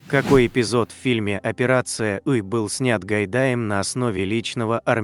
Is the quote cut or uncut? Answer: uncut